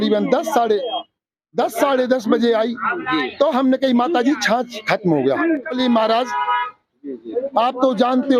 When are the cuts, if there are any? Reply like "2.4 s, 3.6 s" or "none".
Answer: 5.8 s